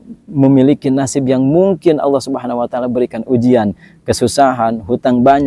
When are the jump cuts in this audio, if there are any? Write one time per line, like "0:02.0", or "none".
none